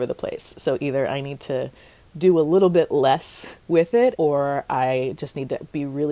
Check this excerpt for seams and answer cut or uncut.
cut